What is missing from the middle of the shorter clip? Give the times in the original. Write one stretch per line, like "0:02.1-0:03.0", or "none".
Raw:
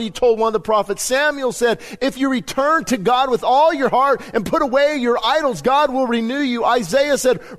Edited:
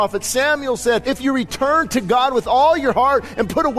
0:01.8-0:02.0